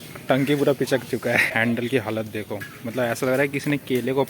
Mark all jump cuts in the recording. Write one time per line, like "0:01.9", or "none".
0:01.5